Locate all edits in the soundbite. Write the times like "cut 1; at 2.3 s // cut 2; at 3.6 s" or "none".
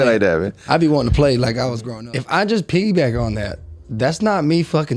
cut 1; at 1.9 s